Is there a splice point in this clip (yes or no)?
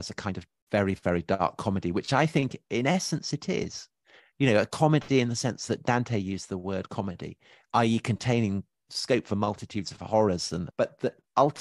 yes